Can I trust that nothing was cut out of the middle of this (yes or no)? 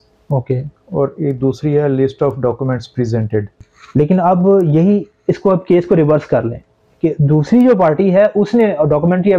no